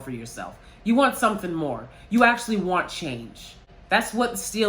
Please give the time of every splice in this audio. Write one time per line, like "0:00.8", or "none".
0:03.7